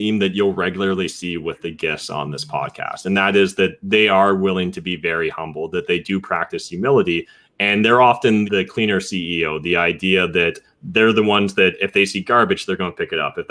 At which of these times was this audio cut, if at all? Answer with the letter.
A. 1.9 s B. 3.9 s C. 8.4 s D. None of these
C